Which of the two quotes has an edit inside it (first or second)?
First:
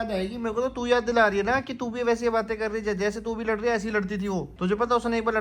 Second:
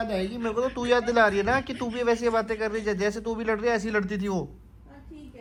first